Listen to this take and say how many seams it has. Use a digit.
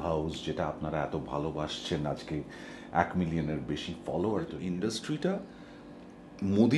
1